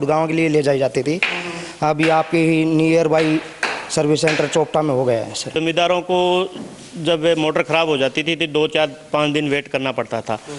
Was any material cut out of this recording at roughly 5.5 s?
yes; 1 cut; at 5.5 s

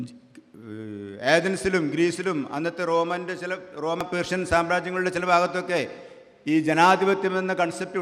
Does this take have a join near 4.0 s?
yes; 1 cut; at 4.0 s

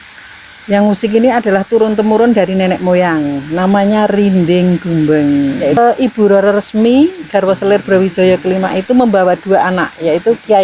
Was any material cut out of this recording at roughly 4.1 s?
no; 1 cut; at 5.8 s

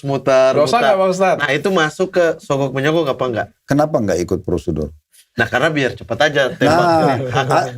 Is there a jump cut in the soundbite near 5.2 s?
no; 1 cut; at 3.6 s

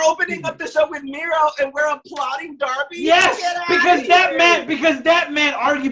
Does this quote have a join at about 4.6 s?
no; 0 cuts

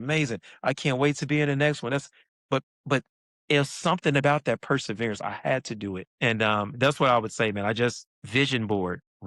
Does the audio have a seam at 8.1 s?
yes; 3 cuts; at 2.7 s, 6.1 s, 8.1 s

